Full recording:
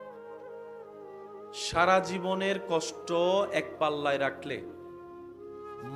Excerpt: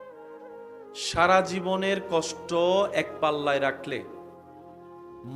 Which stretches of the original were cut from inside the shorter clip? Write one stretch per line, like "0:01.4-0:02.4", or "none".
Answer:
0:01.0-0:01.6

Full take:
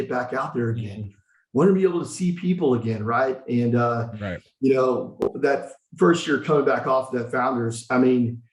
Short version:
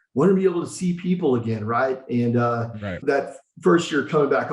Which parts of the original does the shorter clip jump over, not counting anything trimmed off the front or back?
0:04.4-0:05.4

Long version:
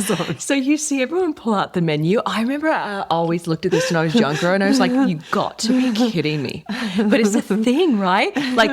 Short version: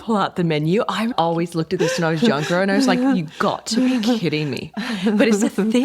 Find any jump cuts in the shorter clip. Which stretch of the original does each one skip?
0:02.5-0:03.0

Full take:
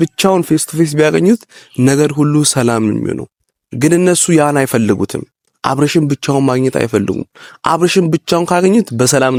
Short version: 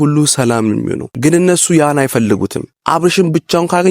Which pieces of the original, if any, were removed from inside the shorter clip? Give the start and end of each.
0:03.2-0:03.6
0:05.3-0:07.5

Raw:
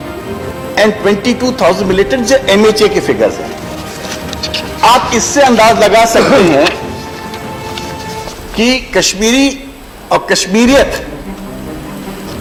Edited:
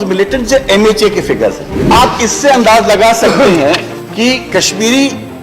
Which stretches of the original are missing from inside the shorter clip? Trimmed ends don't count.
0:03.5-0:04.6
0:06.9-0:08.4

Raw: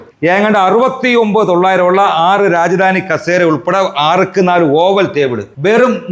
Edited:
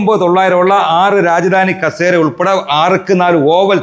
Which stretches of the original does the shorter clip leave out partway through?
none

